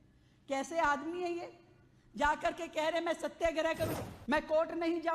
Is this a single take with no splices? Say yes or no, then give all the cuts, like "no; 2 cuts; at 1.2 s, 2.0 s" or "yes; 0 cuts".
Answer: no; 1 cut; at 3.9 s